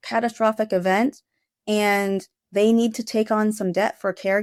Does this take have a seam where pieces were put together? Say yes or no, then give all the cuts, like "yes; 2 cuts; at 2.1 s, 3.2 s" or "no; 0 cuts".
no; 0 cuts